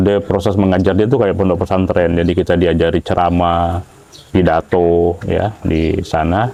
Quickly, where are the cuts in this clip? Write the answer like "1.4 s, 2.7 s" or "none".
none